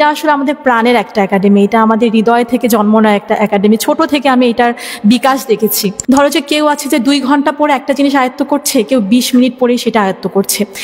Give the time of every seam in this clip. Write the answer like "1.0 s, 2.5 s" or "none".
5.9 s